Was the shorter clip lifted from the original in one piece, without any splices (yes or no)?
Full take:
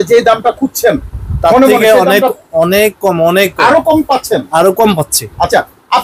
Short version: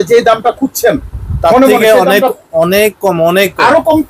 yes